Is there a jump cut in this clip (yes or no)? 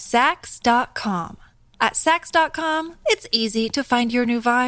no